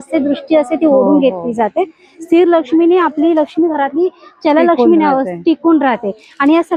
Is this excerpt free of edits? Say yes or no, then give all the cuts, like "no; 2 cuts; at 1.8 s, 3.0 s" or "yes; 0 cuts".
yes; 0 cuts